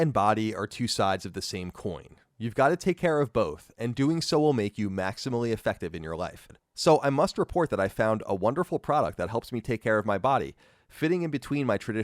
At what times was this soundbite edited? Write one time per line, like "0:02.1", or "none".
0:06.7